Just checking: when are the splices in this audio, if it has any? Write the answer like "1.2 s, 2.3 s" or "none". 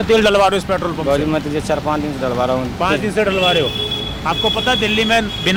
none